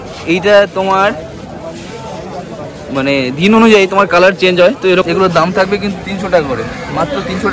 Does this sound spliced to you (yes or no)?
yes